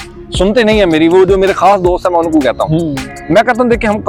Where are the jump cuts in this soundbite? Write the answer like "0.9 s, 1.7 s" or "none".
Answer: none

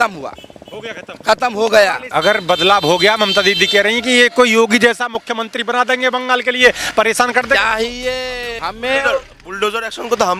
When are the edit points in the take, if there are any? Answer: 2.1 s, 8.5 s

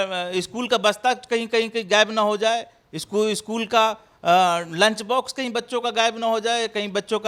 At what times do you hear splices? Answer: none

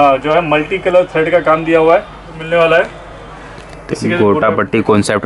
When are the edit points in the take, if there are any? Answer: 2.3 s

